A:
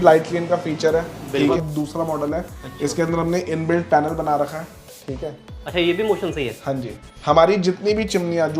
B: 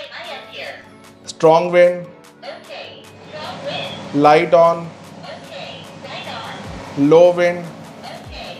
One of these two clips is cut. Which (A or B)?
A